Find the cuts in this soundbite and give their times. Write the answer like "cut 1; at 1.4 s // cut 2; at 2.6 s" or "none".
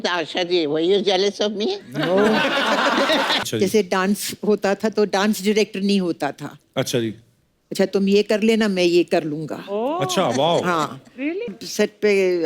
cut 1; at 3.5 s // cut 2; at 11.5 s